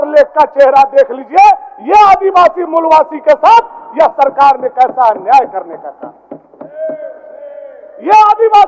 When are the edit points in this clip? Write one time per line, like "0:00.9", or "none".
none

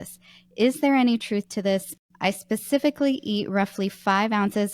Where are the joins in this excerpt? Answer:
0:01.9

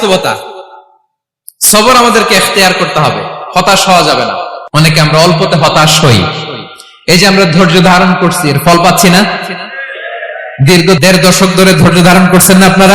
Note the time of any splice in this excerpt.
0:04.5

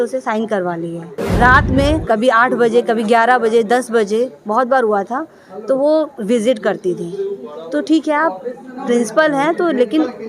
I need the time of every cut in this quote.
0:01.2

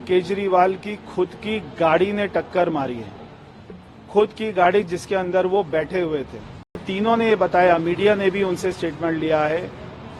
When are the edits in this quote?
0:06.9

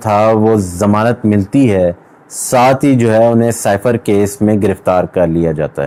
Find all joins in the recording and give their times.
none

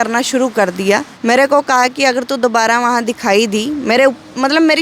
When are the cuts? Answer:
0:01.1

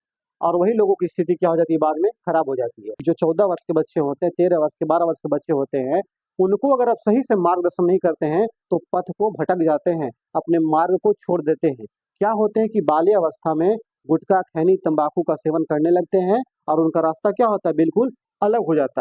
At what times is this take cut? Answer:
0:02.9

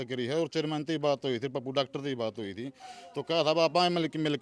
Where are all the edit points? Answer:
none

